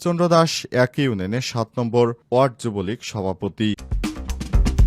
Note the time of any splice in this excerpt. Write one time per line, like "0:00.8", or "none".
0:03.8